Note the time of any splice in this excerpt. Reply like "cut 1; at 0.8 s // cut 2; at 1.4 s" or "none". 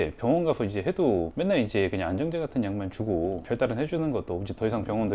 none

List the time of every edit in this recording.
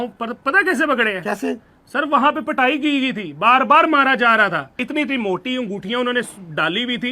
cut 1; at 4.8 s

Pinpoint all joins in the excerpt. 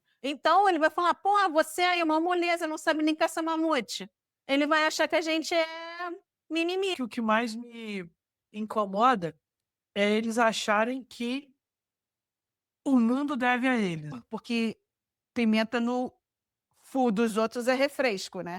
cut 1; at 7.0 s // cut 2; at 14.2 s

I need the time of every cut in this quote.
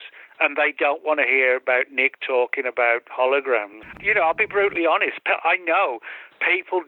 cut 1; at 3.9 s

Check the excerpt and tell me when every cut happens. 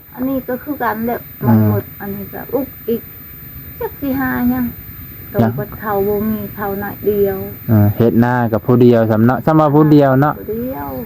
none

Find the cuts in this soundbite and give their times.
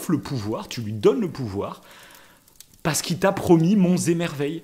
none

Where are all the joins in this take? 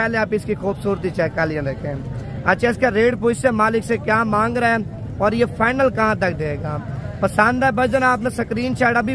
none

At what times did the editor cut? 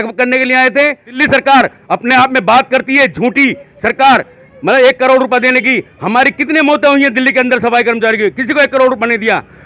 cut 1; at 1.2 s

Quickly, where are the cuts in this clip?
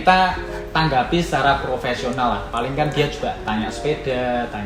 none

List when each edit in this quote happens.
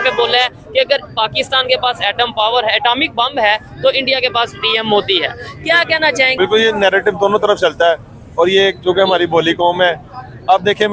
none

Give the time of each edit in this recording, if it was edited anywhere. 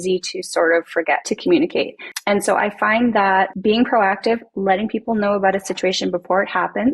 cut 1; at 1.2 s // cut 2; at 2.1 s // cut 3; at 3.5 s

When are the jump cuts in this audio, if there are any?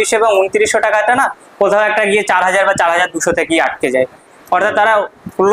cut 1; at 4.3 s

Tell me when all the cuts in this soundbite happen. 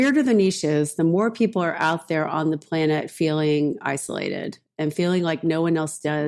cut 1; at 0.9 s

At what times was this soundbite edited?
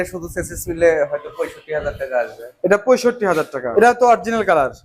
cut 1; at 3.6 s

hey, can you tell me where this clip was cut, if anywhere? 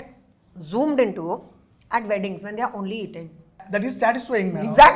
cut 1; at 3.6 s

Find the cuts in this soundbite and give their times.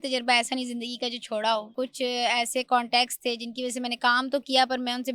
cut 1; at 1.7 s

